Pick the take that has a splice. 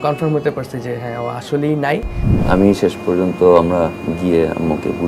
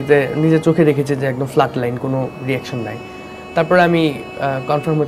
first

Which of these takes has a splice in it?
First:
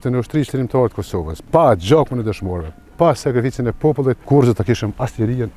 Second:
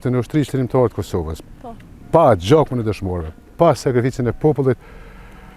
first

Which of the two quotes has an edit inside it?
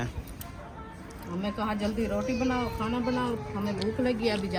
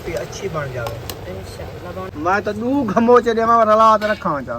second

